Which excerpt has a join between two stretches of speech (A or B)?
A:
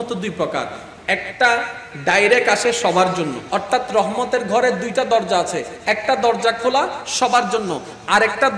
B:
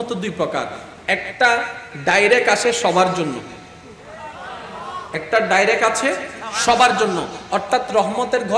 A